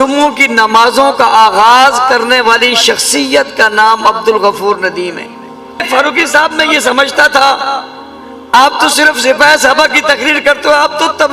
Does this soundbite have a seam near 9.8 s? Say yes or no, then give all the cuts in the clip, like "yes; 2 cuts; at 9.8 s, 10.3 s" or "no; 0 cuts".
no; 1 cut; at 5.8 s